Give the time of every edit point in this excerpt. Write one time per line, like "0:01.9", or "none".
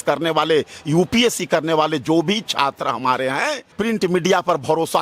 0:03.6

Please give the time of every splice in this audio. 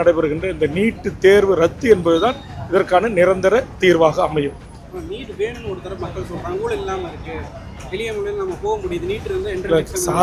none

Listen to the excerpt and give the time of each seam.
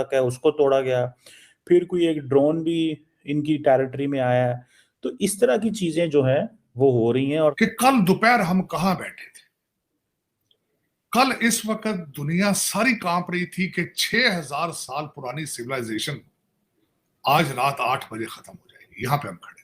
0:07.6

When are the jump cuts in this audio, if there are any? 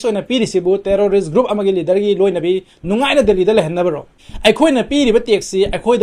none

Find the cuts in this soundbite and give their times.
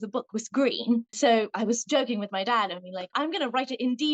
0:01.2
0:03.1

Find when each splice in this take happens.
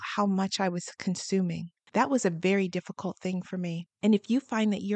none

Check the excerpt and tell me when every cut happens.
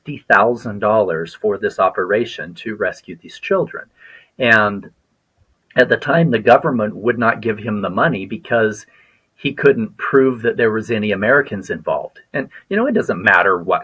none

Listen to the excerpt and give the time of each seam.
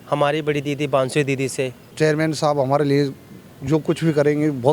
0:01.8

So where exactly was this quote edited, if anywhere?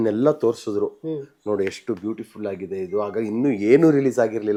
none

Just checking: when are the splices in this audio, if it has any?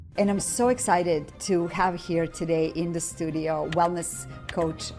0:01.3

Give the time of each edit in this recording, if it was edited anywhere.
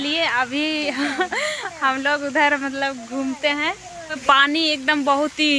0:04.2

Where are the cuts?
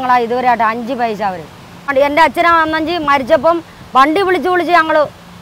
0:01.9

